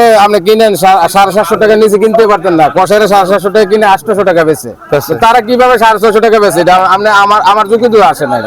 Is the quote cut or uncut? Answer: uncut